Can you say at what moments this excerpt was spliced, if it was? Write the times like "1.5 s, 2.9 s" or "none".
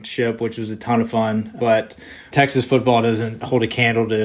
2.3 s, 3.4 s